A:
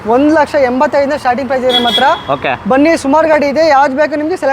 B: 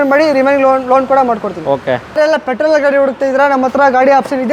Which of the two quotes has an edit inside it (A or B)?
B